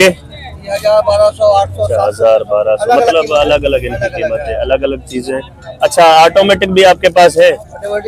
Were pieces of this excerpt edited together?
no; 0 cuts

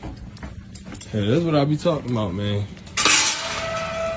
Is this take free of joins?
yes; 0 cuts

